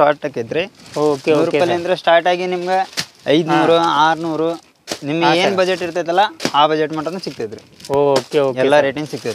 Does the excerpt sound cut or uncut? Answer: uncut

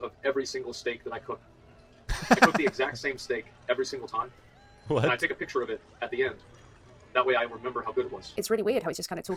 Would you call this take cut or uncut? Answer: uncut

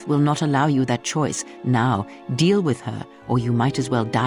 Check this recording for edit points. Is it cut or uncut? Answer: uncut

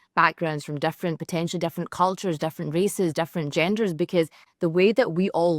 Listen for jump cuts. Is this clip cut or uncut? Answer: cut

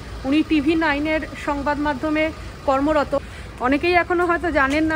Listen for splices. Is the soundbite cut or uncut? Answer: cut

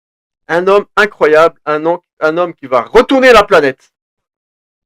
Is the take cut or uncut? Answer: uncut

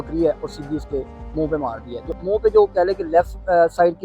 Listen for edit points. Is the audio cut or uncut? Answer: cut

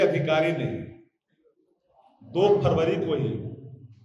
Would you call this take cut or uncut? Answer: uncut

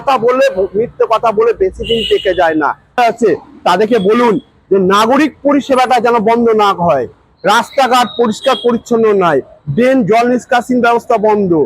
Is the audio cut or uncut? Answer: cut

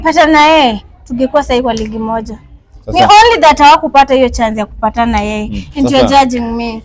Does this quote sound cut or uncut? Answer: uncut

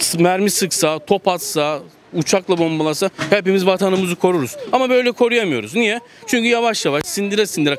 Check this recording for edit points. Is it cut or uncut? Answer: uncut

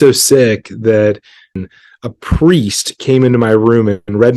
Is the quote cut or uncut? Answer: cut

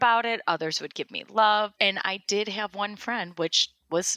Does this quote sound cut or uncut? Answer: cut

